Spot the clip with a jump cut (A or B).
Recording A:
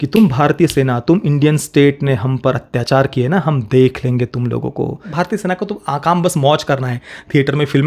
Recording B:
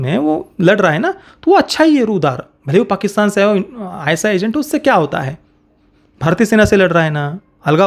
A